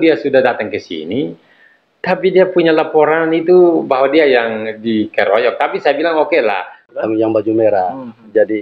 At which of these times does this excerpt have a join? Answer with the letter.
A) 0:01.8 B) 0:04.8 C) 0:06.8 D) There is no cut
C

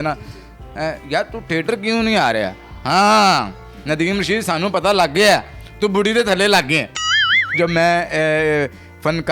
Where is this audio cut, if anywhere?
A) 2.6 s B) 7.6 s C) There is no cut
B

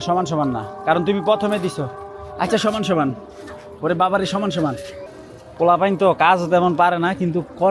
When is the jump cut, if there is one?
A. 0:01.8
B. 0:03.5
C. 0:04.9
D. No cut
C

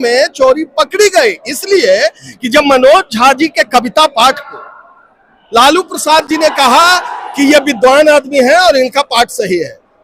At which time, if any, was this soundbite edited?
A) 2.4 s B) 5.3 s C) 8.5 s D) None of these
D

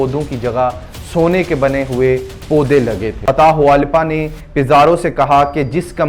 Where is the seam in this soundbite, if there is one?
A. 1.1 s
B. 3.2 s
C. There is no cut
B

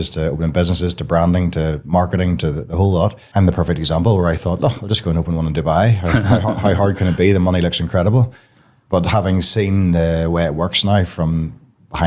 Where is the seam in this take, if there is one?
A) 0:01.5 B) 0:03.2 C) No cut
B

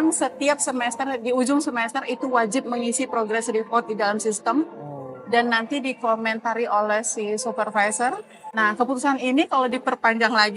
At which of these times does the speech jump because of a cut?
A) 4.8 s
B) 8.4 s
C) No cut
B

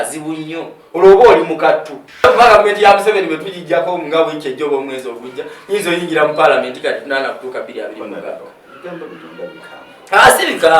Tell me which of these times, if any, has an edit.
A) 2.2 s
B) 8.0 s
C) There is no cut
A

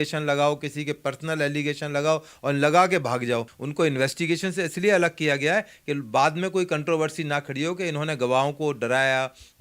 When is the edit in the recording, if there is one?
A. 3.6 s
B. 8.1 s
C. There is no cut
A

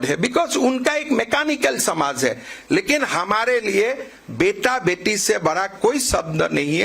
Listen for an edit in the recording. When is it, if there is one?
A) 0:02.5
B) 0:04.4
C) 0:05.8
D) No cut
D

